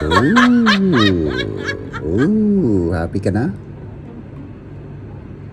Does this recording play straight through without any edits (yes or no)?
yes